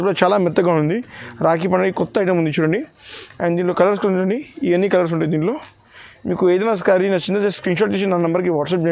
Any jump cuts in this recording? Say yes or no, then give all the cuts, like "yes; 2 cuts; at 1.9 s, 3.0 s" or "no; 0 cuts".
no; 0 cuts